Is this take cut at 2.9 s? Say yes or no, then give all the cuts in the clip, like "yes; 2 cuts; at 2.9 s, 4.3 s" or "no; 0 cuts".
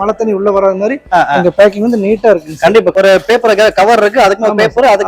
yes; 1 cut; at 2.9 s